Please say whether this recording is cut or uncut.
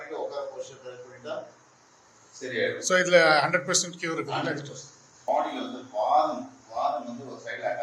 cut